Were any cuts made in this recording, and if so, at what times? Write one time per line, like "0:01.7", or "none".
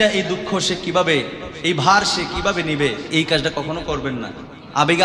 0:03.1